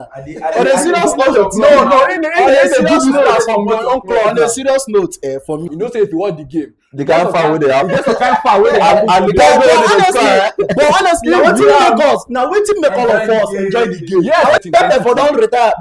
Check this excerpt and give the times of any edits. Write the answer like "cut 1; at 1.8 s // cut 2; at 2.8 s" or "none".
cut 1; at 5.7 s // cut 2; at 14.6 s